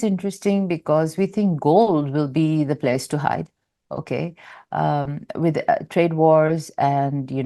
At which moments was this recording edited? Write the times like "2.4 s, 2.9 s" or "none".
none